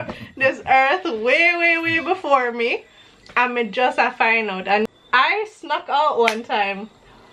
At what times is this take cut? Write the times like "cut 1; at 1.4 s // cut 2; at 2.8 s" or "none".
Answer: cut 1; at 4.9 s